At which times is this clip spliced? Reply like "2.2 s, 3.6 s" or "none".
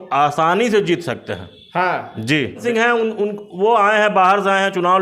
2.6 s

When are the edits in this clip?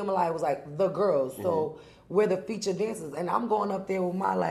none

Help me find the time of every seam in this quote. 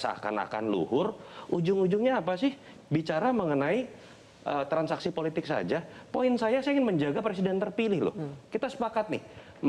none

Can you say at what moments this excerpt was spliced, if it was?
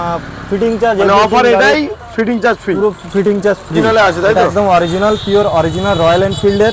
3.8 s

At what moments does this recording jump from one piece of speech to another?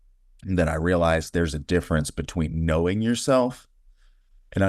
none

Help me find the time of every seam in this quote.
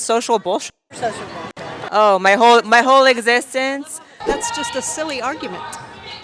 4.2 s

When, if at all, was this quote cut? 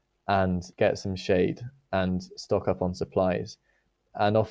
none

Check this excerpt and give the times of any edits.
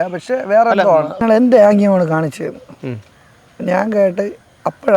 1.2 s

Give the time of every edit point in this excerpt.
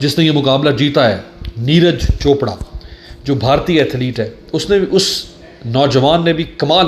none

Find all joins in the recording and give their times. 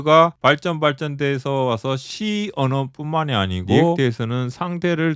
4.0 s

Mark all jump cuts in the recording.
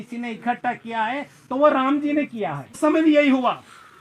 2.8 s

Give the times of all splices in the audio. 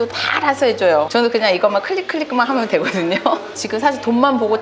1.1 s, 3.5 s

